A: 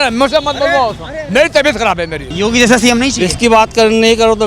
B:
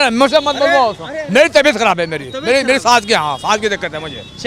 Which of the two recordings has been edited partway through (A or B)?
A